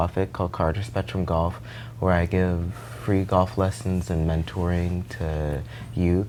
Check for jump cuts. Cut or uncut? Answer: uncut